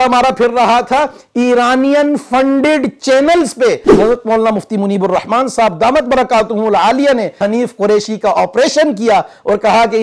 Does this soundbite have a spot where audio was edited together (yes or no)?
yes